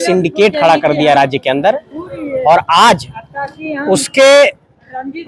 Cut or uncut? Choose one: uncut